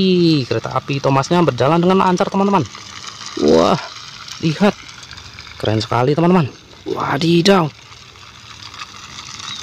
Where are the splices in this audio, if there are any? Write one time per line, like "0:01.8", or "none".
none